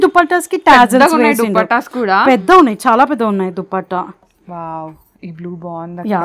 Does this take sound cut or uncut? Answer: cut